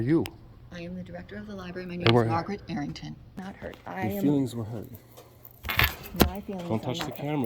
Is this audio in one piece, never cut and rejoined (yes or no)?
no